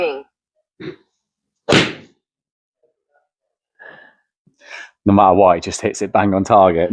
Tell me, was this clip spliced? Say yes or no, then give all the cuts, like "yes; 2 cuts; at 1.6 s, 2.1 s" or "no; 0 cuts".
no; 0 cuts